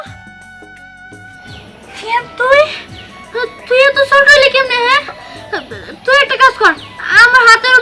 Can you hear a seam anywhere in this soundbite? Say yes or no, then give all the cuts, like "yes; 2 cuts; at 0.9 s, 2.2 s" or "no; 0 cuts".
yes; 1 cut; at 1.9 s